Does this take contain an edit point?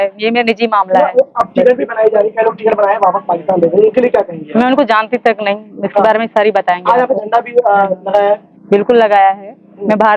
no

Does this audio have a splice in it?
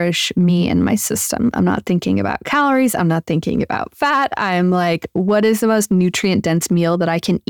no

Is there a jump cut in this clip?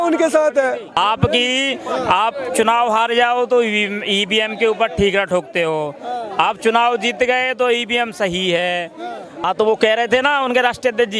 yes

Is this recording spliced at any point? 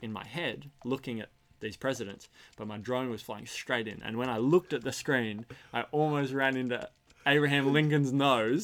no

